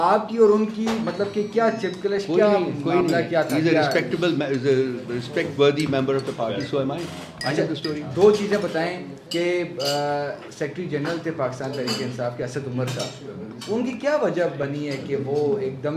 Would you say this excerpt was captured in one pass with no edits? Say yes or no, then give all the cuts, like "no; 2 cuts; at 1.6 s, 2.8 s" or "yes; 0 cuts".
yes; 0 cuts